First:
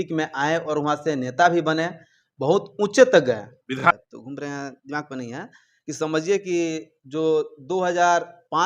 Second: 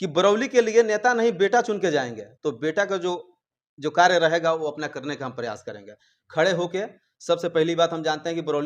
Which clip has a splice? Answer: first; 1 cut; at 3.8 s

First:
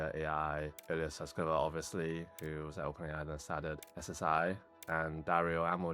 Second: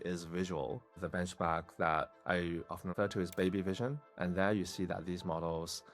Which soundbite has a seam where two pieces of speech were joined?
second; 3 cuts; at 1.0 s, 2.9 s, 4.1 s

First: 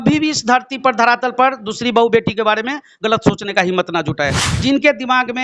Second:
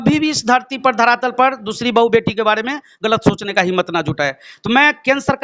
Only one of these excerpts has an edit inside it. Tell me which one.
first; 1 cut; at 4.5 s

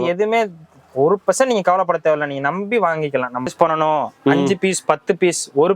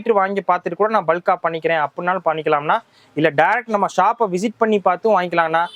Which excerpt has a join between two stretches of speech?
first; 1 cut; at 3.5 s

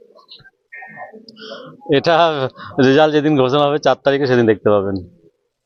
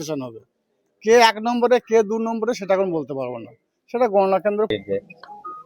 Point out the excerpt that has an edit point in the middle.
second; 1 cut; at 4.7 s

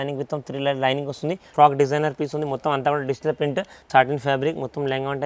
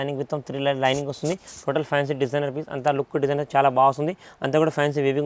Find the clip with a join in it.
first; 2 cuts; at 1.4 s, 3.9 s

